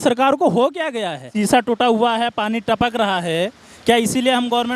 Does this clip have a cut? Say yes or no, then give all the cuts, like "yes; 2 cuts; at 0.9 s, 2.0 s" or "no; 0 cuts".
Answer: yes; 1 cut; at 1.2 s